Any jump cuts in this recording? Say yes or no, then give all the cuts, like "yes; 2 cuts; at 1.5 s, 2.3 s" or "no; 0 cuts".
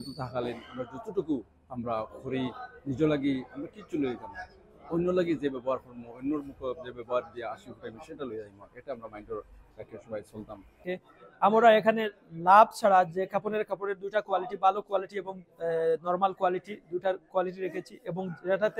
yes; 1 cut; at 10.8 s